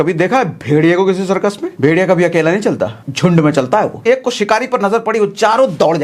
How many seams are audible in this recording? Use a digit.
3